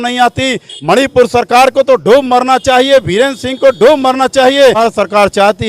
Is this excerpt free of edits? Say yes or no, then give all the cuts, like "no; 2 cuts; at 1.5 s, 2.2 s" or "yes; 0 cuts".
no; 1 cut; at 4.8 s